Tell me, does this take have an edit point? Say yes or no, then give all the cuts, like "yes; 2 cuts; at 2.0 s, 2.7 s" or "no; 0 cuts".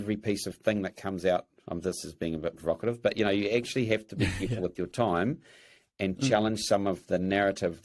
no; 0 cuts